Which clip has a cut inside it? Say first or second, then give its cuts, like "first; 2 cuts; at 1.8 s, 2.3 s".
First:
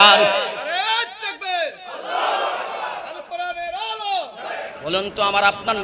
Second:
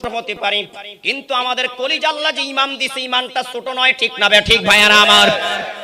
first; 1 cut; at 4.7 s